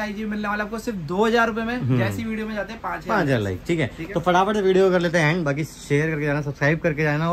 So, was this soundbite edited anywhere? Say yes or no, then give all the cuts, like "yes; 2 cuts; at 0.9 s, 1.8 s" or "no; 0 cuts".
no; 0 cuts